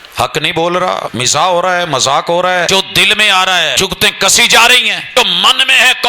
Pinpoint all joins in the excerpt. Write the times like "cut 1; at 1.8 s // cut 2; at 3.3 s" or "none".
cut 1; at 1.2 s // cut 2; at 2.7 s // cut 3; at 3.7 s // cut 4; at 5.0 s